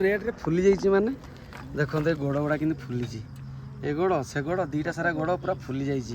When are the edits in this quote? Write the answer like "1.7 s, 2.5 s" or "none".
none